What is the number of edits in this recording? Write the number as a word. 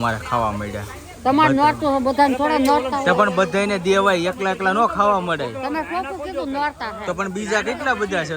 zero